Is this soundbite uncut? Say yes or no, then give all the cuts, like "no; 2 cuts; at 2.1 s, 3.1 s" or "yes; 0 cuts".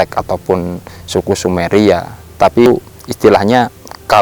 no; 1 cut; at 2.7 s